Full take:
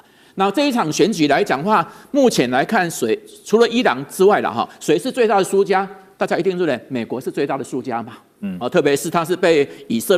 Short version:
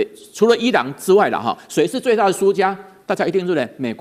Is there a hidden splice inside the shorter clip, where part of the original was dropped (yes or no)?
no